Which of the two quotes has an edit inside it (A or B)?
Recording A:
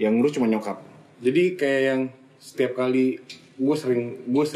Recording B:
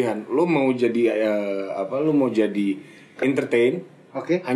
A